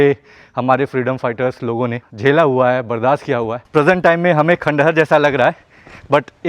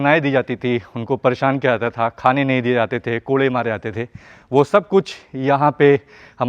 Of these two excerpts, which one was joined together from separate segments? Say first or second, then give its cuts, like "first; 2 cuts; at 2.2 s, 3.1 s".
first; 2 cuts; at 2.1 s, 3.6 s